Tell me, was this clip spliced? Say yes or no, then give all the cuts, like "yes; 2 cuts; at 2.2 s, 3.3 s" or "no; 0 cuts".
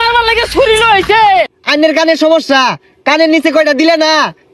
yes; 1 cut; at 1.5 s